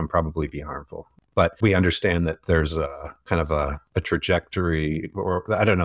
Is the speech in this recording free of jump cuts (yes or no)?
no